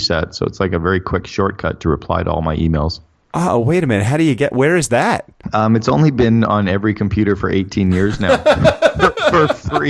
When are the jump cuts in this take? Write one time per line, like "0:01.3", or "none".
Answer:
0:05.4